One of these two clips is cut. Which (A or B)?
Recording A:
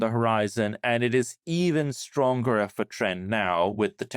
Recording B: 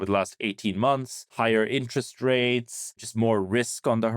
B